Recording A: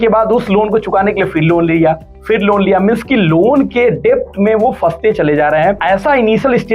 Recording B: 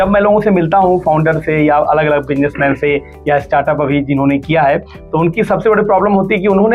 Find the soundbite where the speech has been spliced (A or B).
A